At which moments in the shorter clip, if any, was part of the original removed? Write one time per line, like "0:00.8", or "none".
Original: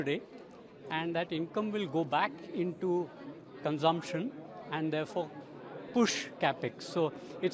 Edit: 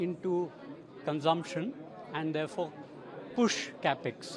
none